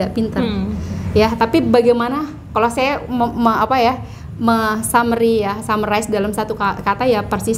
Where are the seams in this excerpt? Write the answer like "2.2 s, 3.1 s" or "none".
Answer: none